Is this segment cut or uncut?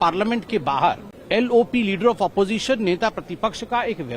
cut